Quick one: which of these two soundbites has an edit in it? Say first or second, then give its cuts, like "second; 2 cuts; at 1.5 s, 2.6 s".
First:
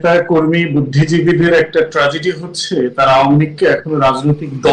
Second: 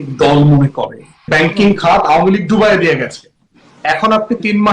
second; 1 cut; at 1.3 s